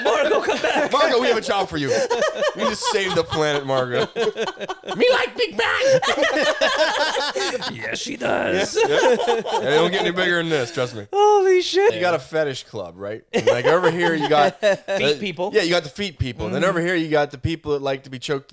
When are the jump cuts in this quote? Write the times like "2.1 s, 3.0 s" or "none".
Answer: 11.9 s